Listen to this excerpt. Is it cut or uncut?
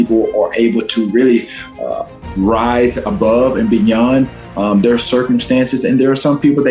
uncut